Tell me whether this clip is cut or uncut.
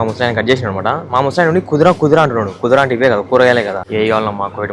cut